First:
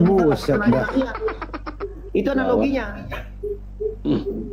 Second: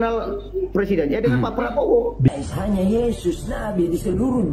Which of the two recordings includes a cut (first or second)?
second